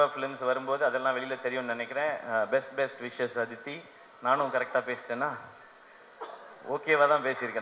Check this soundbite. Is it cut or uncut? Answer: uncut